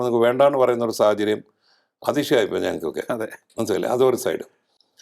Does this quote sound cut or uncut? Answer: uncut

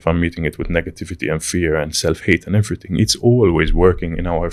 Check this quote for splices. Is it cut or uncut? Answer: uncut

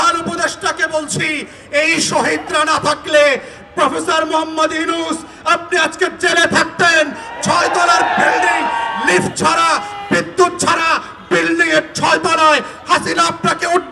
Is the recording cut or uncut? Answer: uncut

